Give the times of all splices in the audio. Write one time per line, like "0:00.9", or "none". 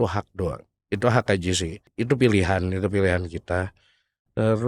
0:01.8